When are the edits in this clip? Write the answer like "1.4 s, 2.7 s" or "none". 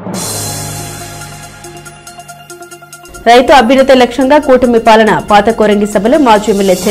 none

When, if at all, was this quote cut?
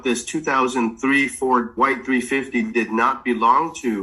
1.7 s

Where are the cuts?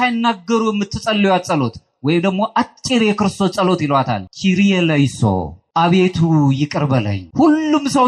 4.2 s, 5.6 s, 7.2 s

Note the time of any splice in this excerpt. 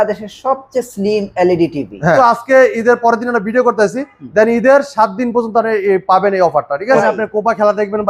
2.2 s, 7.0 s

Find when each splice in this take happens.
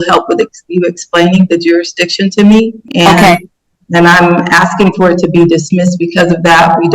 2.8 s

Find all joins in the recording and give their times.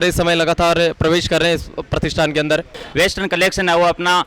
2.7 s

